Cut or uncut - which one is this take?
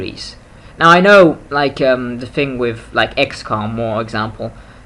uncut